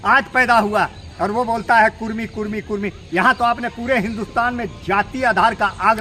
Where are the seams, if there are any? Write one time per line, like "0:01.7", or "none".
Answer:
none